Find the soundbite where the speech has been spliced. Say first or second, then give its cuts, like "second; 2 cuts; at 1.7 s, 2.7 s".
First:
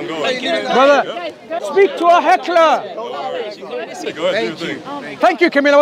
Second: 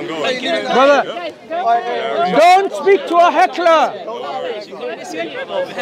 first; 2 cuts; at 1.6 s, 4.0 s